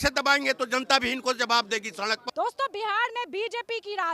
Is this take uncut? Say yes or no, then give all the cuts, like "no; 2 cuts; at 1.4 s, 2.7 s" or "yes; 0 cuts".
no; 1 cut; at 2.2 s